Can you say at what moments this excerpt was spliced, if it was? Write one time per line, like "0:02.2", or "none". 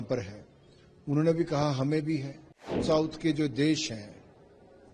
0:02.8